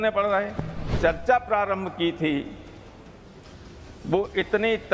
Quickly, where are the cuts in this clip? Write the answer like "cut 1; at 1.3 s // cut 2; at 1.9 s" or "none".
cut 1; at 0.9 s